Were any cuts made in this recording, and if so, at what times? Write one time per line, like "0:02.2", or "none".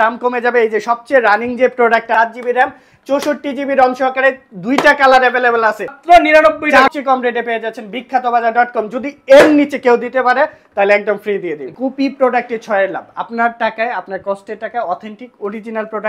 0:02.1
0:05.9
0:06.9
0:11.7